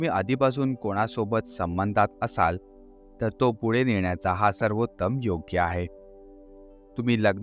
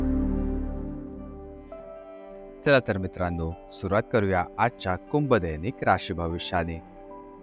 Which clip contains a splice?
second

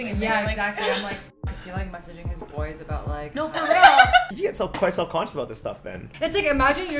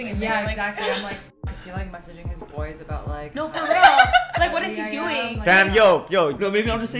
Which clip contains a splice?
first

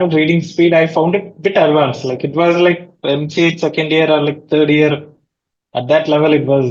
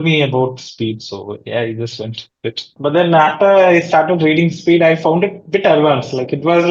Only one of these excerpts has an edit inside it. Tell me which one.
second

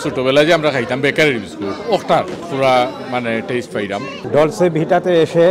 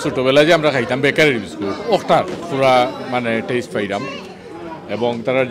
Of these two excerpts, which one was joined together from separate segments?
first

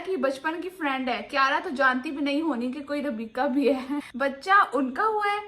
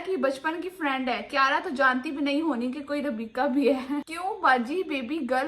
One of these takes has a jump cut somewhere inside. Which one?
first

